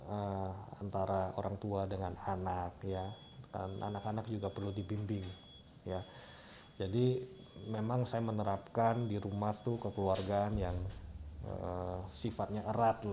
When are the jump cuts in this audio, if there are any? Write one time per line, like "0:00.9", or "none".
none